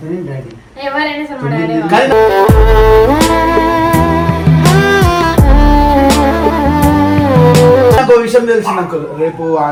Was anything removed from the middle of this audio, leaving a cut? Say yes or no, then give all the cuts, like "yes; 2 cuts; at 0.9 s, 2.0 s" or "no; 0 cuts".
no; 0 cuts